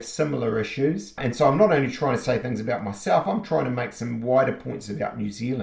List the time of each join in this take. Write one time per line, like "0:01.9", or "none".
0:01.1